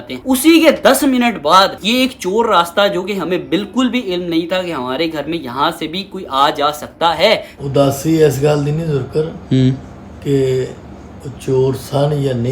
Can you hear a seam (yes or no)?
yes